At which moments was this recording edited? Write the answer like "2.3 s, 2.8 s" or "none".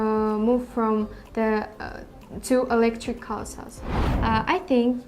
4.0 s